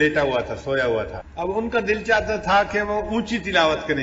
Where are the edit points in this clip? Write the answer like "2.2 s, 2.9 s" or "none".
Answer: 1.2 s